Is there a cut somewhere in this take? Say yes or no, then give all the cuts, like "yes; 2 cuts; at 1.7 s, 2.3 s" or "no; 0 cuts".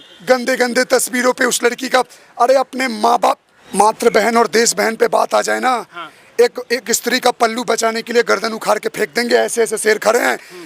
yes; 1 cut; at 3.5 s